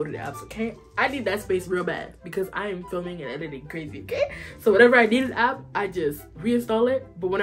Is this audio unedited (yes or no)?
yes